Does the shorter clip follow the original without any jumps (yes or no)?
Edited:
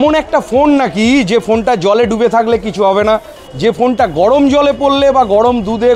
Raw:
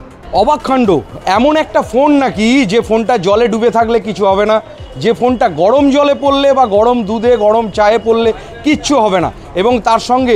yes